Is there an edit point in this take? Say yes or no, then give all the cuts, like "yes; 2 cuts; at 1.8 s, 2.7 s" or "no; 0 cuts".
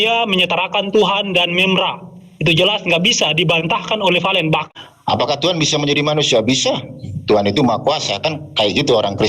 yes; 1 cut; at 4.6 s